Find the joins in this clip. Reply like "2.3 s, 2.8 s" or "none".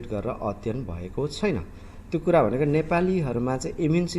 1.9 s